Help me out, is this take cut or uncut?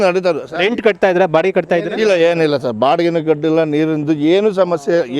uncut